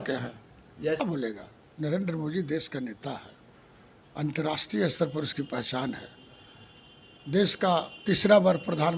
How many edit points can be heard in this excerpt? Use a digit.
1